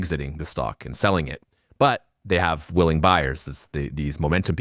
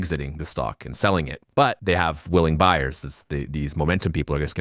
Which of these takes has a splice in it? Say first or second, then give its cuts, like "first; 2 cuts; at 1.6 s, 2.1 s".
second; 1 cut; at 1.7 s